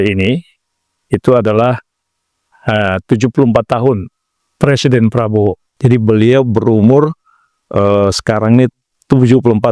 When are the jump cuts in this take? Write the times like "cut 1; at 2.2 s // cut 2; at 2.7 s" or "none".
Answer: cut 1; at 4.4 s // cut 2; at 5.7 s